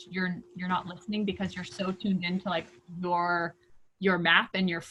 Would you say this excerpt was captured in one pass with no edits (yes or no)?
yes